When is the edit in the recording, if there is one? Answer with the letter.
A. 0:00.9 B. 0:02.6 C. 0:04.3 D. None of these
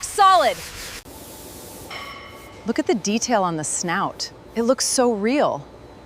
A